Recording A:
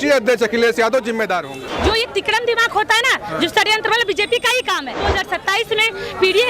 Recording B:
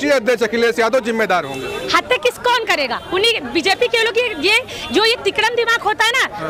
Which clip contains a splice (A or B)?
A